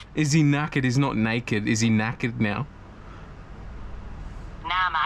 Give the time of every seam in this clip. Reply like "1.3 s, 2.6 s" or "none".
none